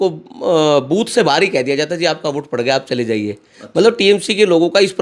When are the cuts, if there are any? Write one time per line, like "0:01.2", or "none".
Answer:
none